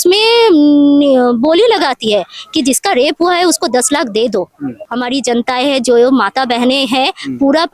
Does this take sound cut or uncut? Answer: cut